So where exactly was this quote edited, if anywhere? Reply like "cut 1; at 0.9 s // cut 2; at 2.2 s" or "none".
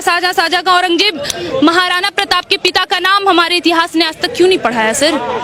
none